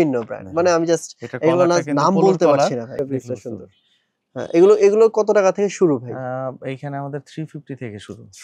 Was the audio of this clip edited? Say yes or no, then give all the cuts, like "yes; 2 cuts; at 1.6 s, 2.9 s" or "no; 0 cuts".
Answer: yes; 1 cut; at 3.0 s